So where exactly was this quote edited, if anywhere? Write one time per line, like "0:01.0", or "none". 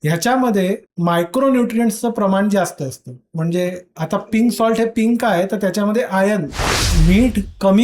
0:06.6